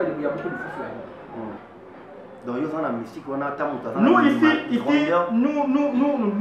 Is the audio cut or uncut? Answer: cut